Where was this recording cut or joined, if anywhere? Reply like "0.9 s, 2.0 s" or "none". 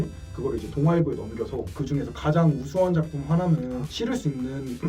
3.9 s